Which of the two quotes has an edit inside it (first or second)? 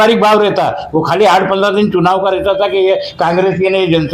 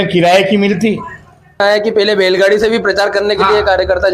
second